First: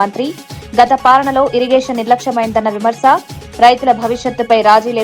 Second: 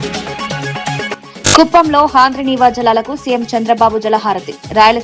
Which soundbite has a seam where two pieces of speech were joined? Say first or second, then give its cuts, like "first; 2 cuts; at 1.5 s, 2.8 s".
second; 1 cut; at 1.1 s